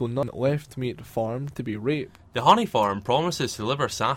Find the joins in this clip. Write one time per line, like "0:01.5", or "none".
0:02.2